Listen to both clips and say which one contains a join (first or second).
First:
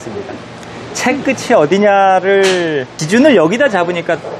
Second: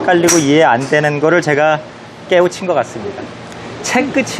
first